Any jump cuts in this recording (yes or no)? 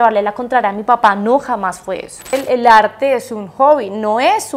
yes